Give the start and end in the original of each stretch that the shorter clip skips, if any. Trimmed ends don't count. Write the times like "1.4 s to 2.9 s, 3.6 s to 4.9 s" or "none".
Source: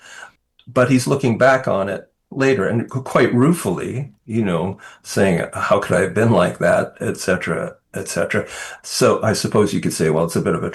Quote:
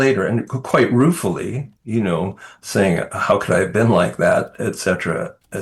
none